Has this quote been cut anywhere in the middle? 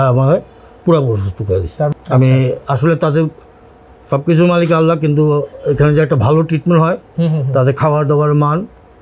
yes; 1 cut; at 1.9 s

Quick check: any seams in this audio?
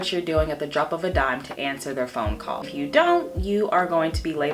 yes; 1 cut; at 2.7 s

